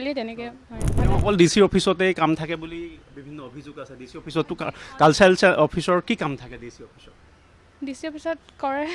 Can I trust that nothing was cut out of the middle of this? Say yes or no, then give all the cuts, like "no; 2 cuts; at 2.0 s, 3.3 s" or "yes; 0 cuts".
no; 1 cut; at 0.9 s